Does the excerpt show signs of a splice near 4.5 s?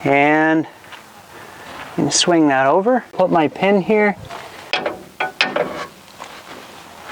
yes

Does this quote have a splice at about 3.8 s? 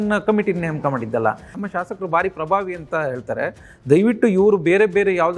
no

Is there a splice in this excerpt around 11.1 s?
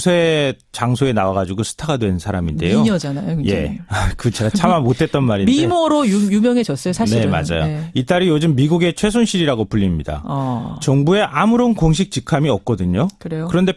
no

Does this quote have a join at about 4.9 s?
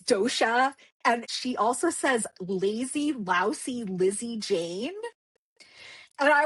no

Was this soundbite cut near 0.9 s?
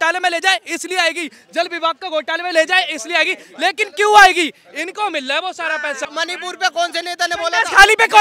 no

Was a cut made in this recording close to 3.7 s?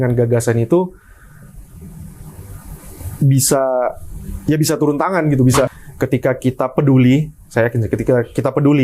no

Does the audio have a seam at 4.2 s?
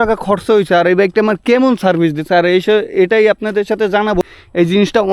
yes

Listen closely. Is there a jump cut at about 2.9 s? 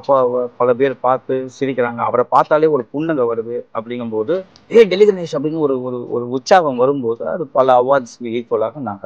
no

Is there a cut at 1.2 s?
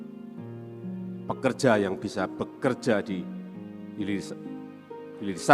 yes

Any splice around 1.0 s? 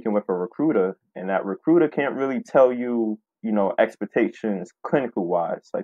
no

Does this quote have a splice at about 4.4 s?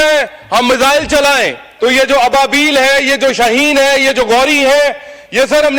no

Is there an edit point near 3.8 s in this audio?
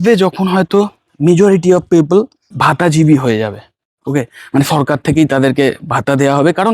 no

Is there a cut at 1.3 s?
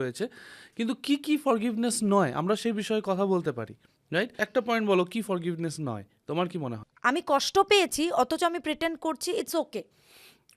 no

